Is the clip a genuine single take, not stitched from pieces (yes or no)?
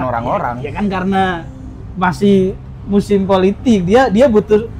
yes